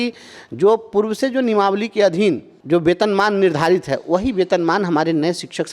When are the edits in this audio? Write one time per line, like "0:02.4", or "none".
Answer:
0:02.5